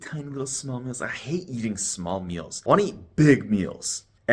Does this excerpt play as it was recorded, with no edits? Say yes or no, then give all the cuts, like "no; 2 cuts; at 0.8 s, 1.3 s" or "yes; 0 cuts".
yes; 0 cuts